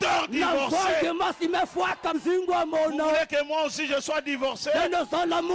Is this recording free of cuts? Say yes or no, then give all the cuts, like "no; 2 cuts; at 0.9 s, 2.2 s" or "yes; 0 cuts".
no; 1 cut; at 2.2 s